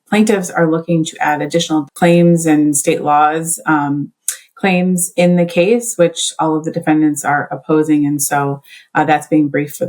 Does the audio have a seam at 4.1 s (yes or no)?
no